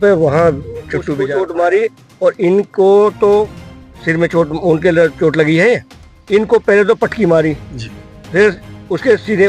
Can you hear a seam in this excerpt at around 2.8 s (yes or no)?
no